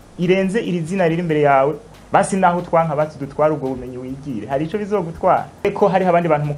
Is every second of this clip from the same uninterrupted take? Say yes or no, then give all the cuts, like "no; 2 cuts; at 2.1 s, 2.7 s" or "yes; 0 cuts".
no; 1 cut; at 5.6 s